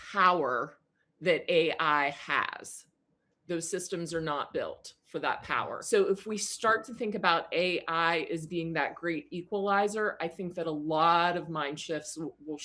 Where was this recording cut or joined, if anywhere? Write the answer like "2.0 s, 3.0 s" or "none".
5.8 s